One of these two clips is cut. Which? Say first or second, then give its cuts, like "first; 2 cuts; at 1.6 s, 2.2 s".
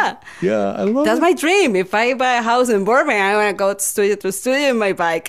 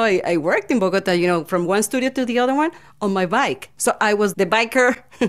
second; 1 cut; at 4.3 s